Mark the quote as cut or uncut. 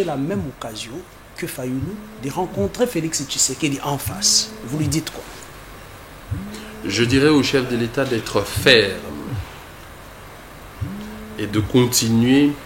uncut